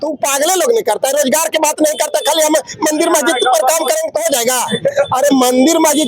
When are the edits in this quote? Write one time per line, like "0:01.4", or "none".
none